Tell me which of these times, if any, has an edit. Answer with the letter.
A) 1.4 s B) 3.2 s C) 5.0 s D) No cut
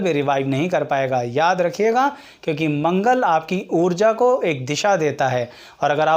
D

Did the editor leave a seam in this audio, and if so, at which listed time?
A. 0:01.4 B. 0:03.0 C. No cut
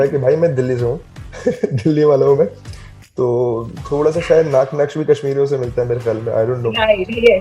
C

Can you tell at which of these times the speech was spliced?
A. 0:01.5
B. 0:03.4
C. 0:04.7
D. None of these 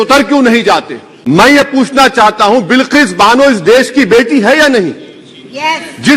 A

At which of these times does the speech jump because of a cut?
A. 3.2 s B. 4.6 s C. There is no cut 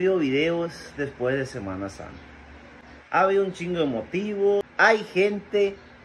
B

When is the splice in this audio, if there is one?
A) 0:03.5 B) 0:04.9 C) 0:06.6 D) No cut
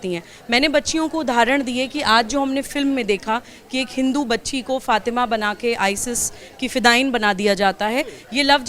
D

